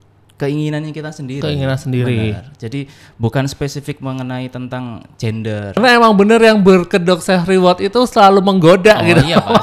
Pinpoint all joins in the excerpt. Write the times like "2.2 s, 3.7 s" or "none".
5.8 s